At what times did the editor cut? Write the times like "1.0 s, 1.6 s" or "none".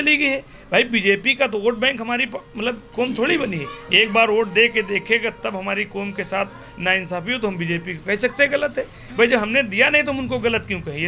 none